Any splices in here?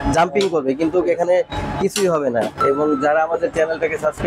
yes; 1 cut; at 2.6 s

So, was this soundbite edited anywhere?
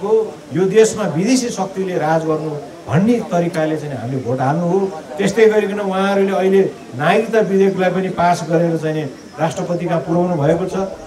no; 0 cuts

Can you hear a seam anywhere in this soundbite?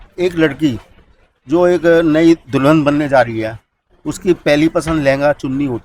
no; 0 cuts

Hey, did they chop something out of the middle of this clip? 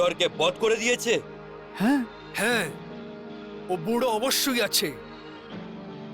no; 0 cuts

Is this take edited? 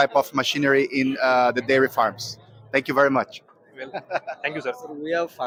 no; 0 cuts

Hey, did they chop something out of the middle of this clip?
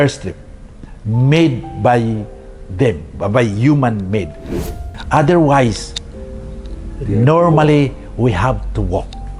yes; 1 cut; at 4.6 s

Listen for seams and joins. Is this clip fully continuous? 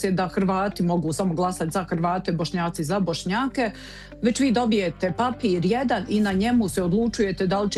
yes; 0 cuts

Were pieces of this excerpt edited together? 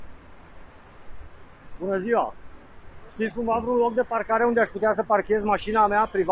no; 0 cuts

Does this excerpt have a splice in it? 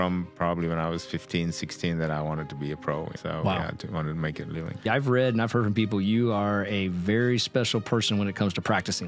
yes; 1 cut; at 4.8 s

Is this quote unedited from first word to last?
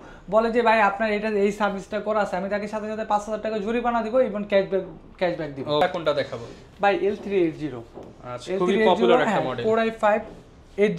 yes; 0 cuts

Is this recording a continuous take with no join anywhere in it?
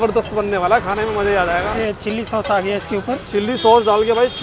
no; 1 cut; at 1.7 s

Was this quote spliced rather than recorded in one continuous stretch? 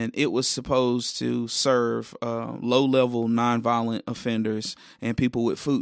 no; 0 cuts

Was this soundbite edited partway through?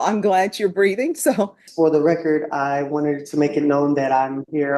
yes; 1 cut; at 1.6 s

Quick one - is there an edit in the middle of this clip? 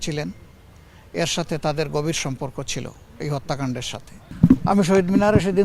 yes; 1 cut; at 4.3 s

